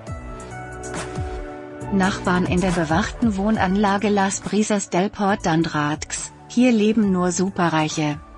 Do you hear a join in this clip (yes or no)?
yes